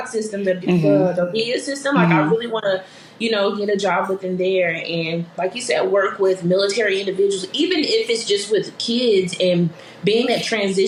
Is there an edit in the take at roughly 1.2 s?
no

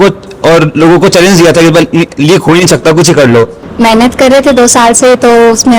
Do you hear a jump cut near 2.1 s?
no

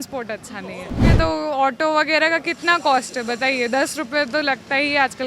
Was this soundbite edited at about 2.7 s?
no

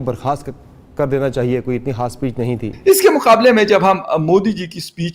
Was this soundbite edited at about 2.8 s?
yes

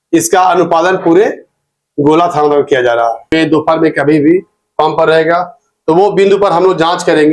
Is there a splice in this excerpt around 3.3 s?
yes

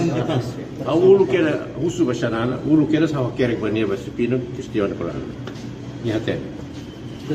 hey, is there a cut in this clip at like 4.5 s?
no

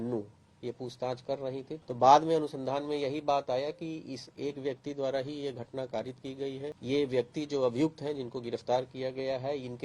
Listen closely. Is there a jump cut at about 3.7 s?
no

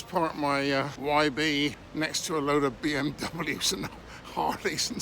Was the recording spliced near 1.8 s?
yes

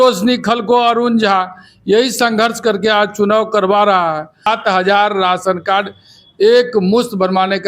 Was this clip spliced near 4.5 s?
yes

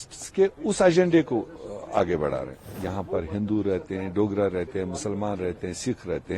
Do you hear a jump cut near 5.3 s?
no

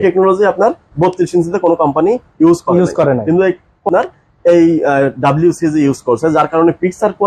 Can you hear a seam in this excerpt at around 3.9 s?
yes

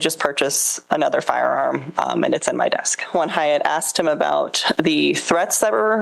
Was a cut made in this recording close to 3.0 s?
yes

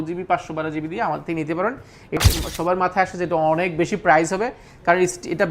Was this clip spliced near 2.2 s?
yes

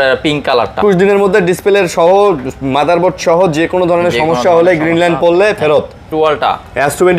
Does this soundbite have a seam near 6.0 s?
yes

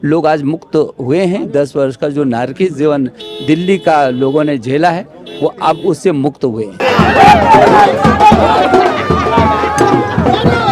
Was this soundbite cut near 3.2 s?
no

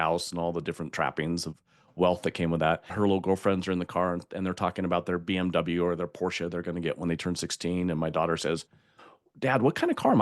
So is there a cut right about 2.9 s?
yes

